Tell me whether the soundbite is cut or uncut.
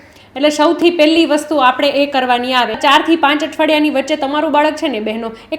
cut